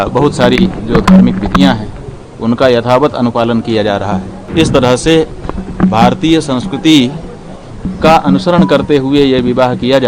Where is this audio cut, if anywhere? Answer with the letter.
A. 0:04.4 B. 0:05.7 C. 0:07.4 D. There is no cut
A